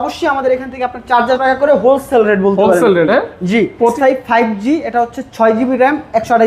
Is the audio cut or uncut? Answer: cut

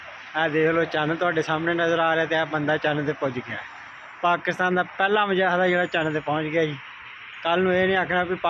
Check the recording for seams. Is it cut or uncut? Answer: uncut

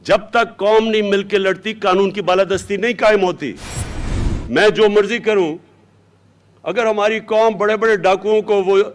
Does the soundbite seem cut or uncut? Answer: uncut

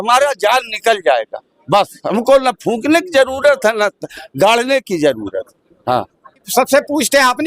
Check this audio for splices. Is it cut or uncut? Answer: cut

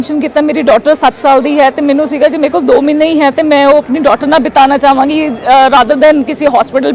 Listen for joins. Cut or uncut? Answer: uncut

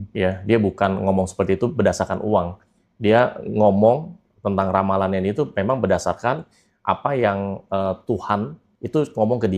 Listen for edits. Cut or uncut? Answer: uncut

